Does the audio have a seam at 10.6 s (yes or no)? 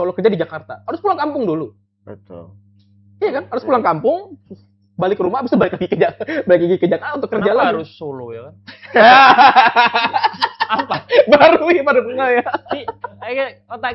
no